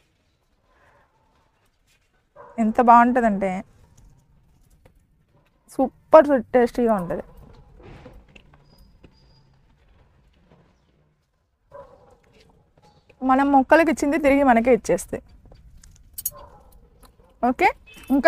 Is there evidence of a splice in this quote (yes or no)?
no